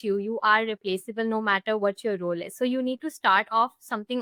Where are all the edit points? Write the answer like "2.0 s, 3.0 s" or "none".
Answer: none

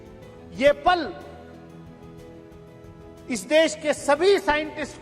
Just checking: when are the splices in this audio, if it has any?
1.3 s, 3.3 s

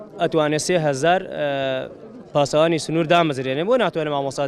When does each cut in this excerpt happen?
none

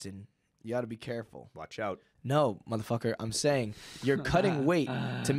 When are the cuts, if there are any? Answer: 2.1 s

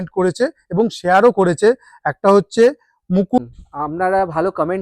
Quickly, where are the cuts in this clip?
3.4 s

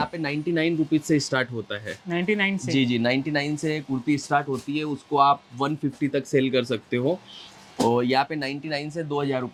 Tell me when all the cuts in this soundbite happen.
none

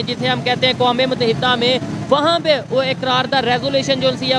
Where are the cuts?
none

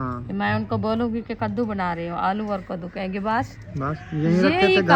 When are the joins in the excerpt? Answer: none

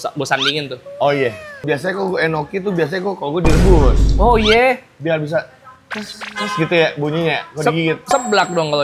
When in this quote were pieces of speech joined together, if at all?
1.6 s

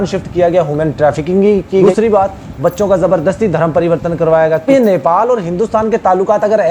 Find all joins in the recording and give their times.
1.8 s, 4.7 s

